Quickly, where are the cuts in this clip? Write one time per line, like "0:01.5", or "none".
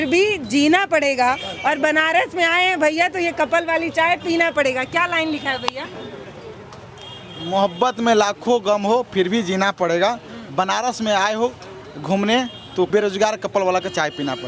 none